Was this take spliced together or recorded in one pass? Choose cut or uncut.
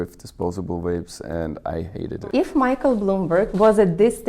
cut